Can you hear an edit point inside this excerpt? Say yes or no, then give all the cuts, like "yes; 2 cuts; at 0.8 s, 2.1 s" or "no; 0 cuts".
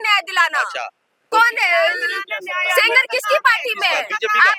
no; 0 cuts